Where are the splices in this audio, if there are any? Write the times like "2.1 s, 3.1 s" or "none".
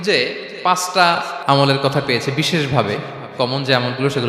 1.3 s